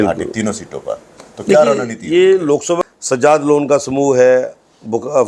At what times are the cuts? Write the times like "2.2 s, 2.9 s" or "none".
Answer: 2.8 s